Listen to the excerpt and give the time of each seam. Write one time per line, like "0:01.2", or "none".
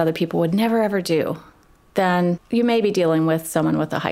0:02.4

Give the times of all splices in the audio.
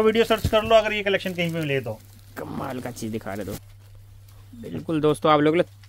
0:03.6

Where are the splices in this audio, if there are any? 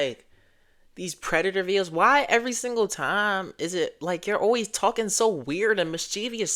none

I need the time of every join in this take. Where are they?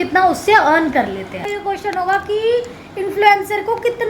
0:01.5

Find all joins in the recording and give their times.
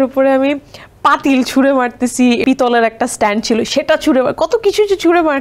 0:02.4

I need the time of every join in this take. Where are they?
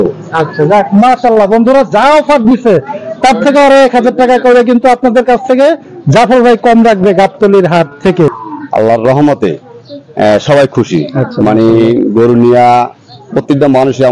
0:08.5

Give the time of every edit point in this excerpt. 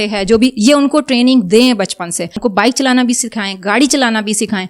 0:02.3

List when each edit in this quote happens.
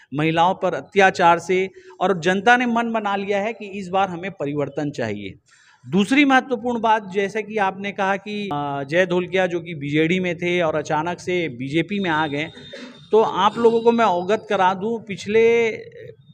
none

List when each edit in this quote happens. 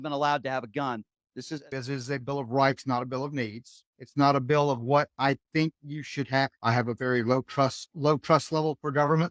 0:01.6
0:06.6

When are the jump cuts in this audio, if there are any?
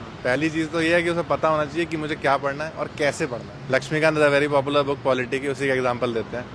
0:03.5

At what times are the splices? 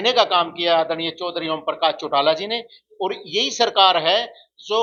none

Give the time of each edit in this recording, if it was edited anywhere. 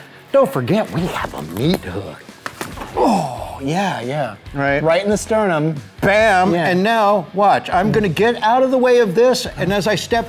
0:02.2

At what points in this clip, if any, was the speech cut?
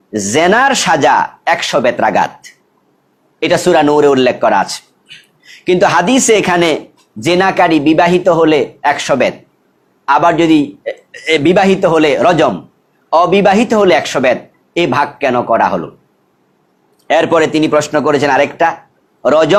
none

